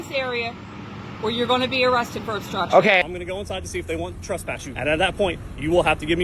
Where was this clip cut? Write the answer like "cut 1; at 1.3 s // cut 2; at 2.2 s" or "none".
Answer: cut 1; at 3.0 s // cut 2; at 4.7 s

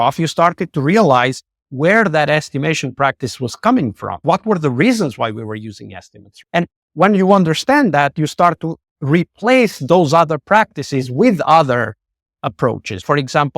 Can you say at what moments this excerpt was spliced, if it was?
cut 1; at 4.2 s

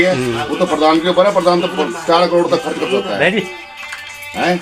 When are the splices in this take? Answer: none

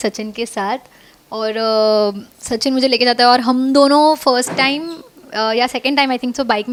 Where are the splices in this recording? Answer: none

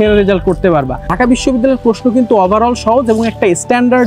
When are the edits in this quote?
cut 1; at 1.1 s

